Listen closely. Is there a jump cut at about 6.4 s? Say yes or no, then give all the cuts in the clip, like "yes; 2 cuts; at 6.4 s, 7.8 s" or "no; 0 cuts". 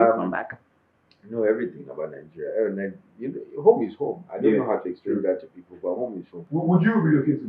yes; 1 cut; at 6.4 s